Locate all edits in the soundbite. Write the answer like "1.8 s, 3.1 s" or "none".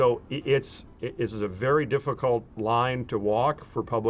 0.9 s, 2.6 s